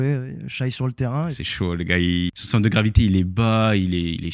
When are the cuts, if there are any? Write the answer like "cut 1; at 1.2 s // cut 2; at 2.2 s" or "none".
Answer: cut 1; at 1.4 s // cut 2; at 2.3 s